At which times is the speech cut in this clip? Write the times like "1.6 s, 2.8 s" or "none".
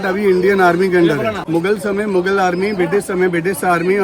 1.4 s